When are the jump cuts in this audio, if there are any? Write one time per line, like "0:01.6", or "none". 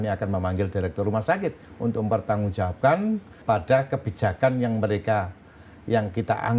0:03.3

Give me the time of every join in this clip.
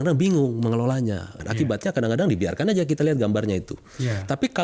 0:01.4

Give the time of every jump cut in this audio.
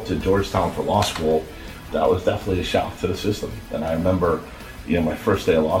0:01.8
0:03.6

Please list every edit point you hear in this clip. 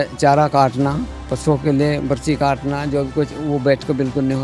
0:01.2

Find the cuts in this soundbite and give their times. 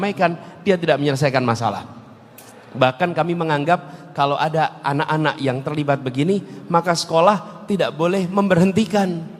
none

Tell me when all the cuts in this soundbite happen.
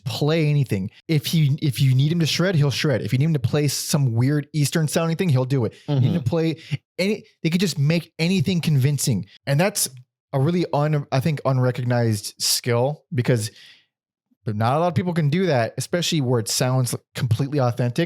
0:01.0
0:09.4

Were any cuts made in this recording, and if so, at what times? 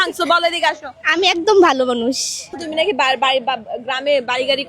0:02.6

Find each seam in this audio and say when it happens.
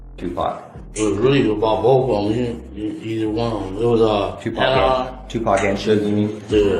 none

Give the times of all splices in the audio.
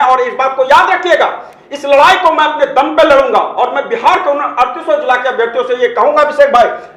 none

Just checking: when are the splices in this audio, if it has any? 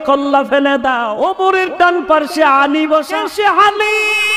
0:01.1
0:03.2

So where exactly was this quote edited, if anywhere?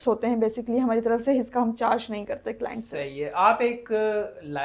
none

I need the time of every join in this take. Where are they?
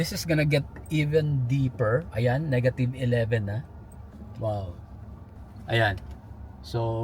none

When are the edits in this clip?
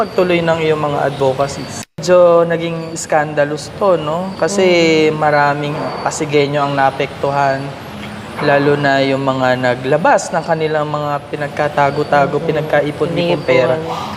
0:02.0

